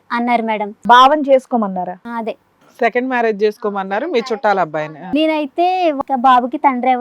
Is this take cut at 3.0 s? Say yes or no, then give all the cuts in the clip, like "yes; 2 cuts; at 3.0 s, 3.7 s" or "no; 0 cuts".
no; 3 cuts; at 0.8 s, 5.0 s, 6.0 s